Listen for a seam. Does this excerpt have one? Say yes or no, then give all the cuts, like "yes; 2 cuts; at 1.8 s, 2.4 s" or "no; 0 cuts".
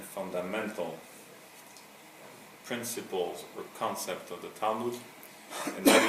no; 0 cuts